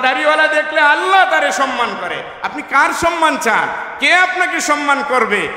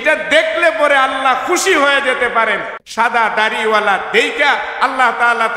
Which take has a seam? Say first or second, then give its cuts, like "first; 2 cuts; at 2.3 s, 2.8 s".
second; 1 cut; at 2.8 s